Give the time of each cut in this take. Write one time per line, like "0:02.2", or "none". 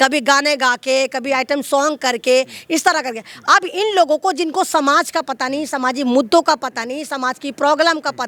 none